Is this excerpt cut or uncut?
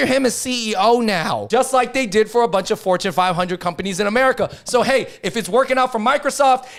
uncut